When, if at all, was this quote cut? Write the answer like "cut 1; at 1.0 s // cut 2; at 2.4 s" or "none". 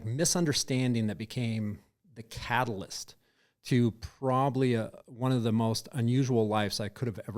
none